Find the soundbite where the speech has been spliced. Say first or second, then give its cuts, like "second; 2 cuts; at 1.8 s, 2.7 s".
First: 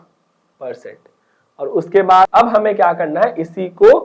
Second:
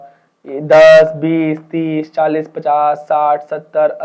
first; 1 cut; at 2.3 s